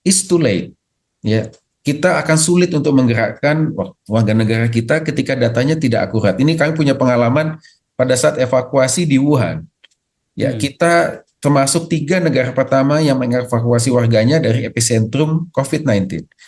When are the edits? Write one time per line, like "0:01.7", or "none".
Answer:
none

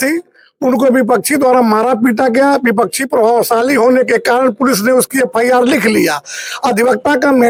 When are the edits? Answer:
none

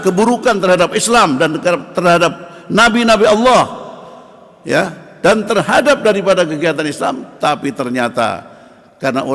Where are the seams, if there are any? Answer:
none

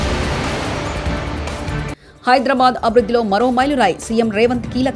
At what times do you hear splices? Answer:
0:02.0

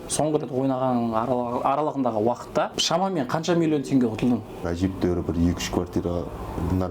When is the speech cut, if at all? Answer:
0:02.8
0:04.6

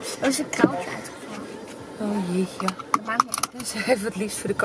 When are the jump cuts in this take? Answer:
none

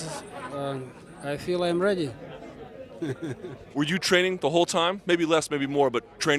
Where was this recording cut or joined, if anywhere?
none

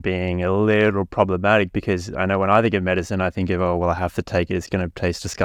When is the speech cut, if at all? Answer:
none

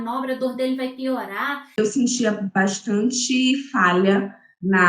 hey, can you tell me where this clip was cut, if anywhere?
0:01.7

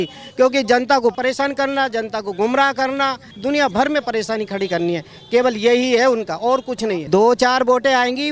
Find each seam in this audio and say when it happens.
0:01.1
0:03.3
0:07.0

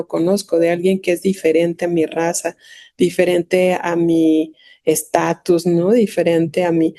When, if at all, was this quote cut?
none

